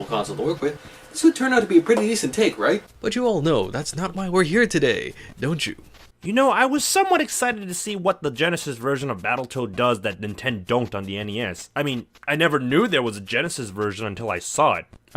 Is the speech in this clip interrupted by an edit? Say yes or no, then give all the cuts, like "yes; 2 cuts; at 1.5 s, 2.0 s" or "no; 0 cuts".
no; 0 cuts